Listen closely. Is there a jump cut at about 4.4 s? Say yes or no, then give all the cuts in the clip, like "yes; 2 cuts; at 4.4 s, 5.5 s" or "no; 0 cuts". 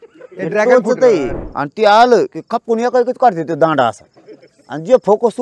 no; 1 cut; at 1.4 s